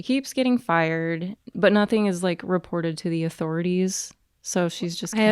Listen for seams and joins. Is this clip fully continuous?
no; 1 cut; at 1.4 s

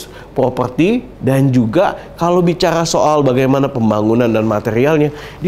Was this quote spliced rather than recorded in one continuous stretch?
yes; 1 cut; at 1.1 s

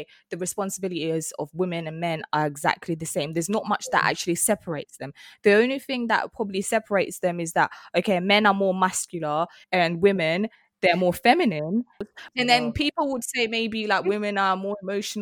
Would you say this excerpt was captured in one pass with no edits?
no; 2 cuts; at 9.6 s, 12.0 s

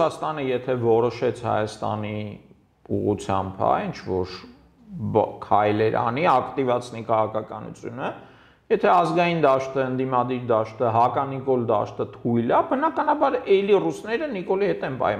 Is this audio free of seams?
yes; 0 cuts

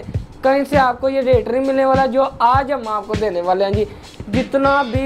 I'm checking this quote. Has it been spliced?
yes; 1 cut; at 4.0 s

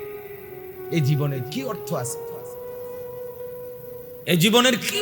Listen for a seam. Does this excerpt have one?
yes; 1 cut; at 0.9 s

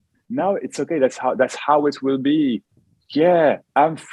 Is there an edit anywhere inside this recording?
no; 0 cuts

